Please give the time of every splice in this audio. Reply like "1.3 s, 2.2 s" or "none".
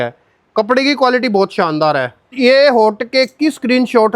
2.2 s